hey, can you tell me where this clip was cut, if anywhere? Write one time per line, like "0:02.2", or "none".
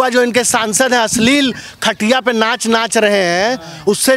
none